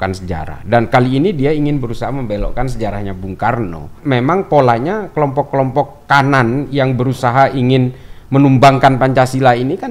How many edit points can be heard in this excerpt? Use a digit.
1